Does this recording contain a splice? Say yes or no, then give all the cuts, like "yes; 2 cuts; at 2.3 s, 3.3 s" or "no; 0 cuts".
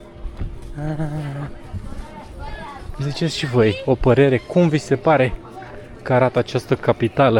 no; 0 cuts